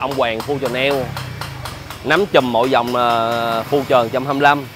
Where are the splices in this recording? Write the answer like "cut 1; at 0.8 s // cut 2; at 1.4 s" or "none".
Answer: none